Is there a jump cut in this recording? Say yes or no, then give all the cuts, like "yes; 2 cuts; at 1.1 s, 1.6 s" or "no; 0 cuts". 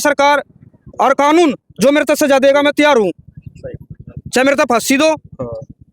no; 0 cuts